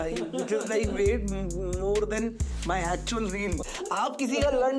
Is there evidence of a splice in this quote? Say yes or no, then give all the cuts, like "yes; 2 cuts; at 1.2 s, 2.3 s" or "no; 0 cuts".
yes; 1 cut; at 3.6 s